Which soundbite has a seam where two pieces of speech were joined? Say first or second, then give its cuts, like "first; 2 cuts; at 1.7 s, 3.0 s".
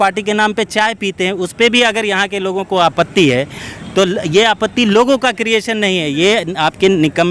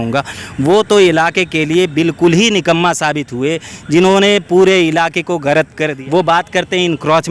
second; 1 cut; at 5.9 s